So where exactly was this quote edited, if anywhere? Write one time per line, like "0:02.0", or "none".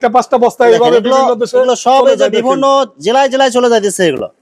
none